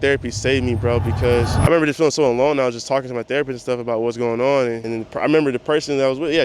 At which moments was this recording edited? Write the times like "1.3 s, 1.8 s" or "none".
1.5 s, 4.8 s